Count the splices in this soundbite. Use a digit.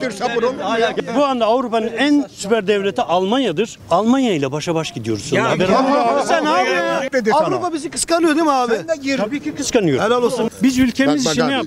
3